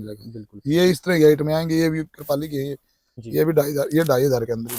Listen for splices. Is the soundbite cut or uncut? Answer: uncut